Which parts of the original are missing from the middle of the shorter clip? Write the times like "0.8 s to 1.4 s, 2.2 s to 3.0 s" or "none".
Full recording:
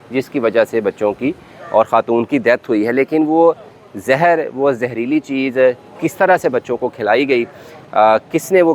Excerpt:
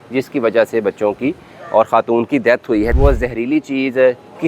2.9 s to 4.5 s